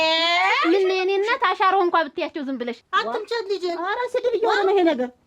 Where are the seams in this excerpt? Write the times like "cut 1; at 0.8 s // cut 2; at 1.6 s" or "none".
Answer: cut 1; at 2.8 s